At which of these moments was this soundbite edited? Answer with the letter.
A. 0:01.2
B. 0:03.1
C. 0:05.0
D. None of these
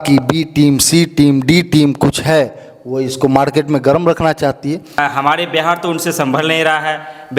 C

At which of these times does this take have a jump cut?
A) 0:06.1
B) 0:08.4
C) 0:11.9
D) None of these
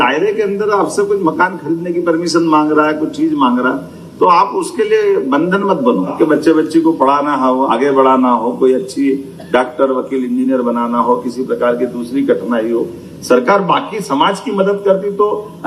A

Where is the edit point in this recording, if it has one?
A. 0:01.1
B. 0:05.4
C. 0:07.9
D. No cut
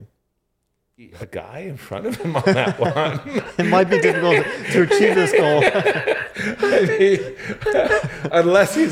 A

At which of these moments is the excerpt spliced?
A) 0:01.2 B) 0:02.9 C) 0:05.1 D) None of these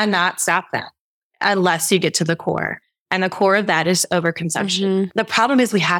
C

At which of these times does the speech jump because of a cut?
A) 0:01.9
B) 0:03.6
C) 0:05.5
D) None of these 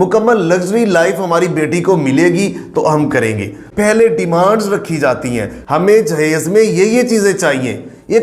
B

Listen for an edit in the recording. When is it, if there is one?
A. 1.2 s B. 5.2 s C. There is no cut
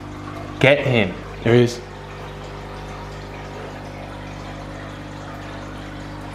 A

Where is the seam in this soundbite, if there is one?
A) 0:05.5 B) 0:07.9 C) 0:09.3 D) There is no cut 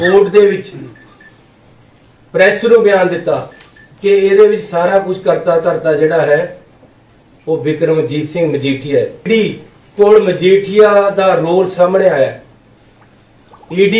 C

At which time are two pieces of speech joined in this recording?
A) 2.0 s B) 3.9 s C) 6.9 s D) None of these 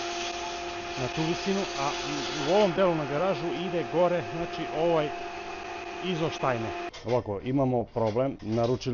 C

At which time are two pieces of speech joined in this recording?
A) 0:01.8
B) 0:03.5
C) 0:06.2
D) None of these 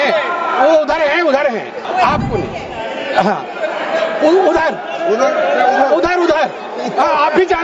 A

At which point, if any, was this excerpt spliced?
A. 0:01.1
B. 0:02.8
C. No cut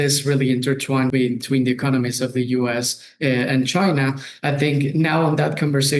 A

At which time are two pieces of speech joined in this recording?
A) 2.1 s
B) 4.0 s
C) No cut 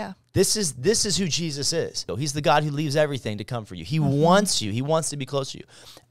A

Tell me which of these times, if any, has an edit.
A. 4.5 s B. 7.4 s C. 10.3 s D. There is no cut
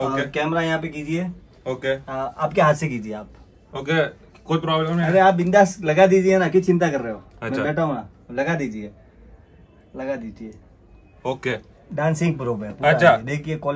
D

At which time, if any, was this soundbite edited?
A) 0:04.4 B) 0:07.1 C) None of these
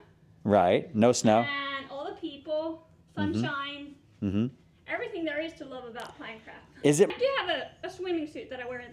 B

